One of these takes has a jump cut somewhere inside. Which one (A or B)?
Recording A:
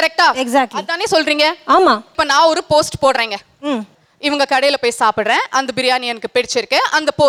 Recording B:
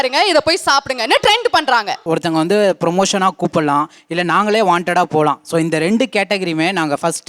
B